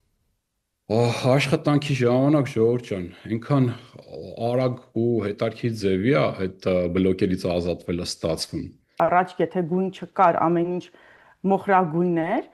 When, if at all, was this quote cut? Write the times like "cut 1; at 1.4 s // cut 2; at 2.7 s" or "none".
cut 1; at 8.9 s